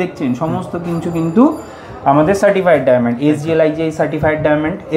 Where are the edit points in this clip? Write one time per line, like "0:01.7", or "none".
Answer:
none